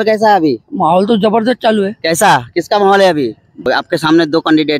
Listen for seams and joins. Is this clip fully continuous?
no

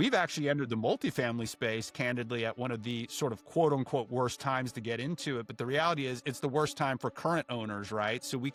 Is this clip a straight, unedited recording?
yes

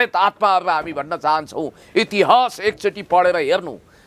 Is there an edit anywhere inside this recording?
no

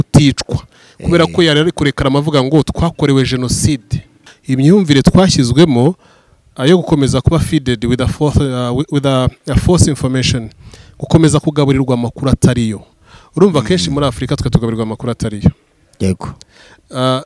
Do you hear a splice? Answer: yes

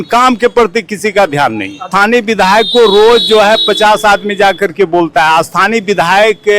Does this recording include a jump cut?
yes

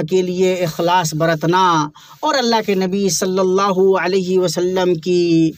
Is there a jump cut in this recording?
no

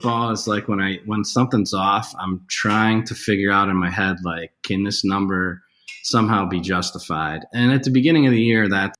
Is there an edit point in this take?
no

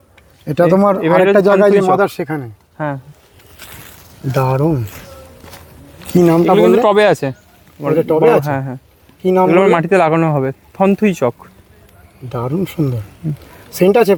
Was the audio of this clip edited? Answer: no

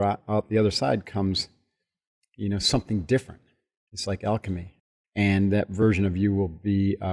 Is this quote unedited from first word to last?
no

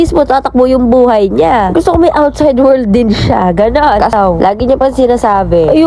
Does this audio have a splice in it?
yes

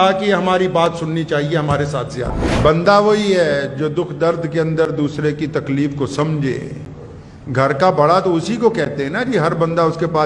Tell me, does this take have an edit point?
yes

